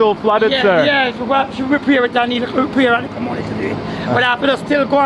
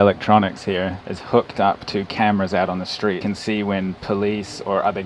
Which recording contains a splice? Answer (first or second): second